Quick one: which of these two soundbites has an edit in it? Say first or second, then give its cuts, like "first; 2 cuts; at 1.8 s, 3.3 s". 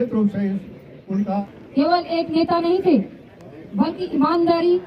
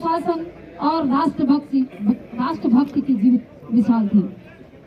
first; 1 cut; at 1.5 s